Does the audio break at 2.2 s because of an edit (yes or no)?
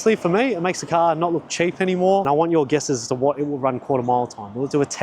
yes